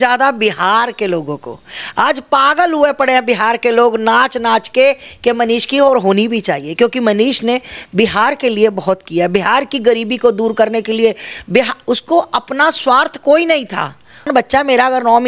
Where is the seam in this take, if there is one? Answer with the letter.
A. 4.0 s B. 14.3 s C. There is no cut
B